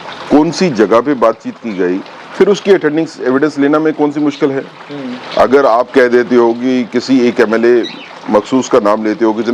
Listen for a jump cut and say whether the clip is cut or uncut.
uncut